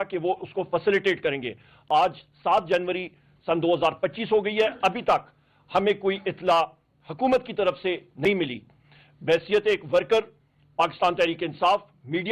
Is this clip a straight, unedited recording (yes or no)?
yes